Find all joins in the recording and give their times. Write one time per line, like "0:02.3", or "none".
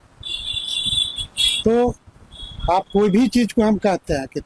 none